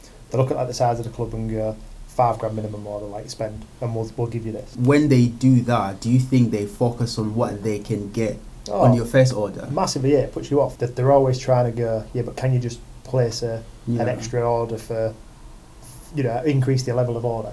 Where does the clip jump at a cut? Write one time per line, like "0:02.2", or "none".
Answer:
0:04.8
0:10.7